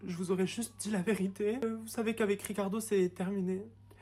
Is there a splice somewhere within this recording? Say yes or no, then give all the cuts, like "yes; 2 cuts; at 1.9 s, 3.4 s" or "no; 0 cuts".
yes; 1 cut; at 1.6 s